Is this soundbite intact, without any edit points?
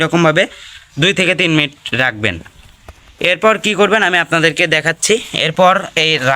yes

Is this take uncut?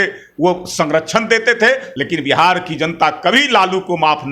no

